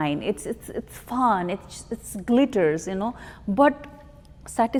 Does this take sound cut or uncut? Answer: uncut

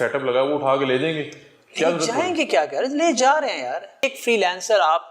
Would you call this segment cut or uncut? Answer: cut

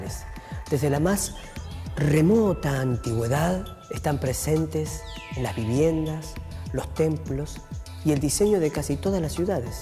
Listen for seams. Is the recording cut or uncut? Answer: cut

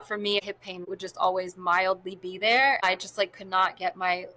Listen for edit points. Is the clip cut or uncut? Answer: cut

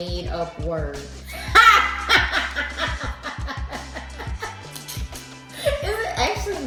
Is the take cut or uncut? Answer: uncut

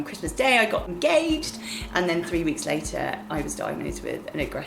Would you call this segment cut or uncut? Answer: cut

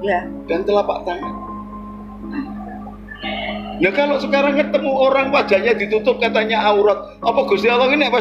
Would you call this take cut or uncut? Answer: uncut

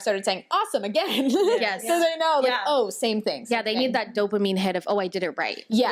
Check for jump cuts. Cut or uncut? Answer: uncut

